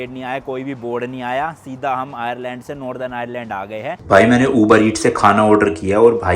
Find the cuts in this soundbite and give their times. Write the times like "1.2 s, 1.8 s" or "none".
4.0 s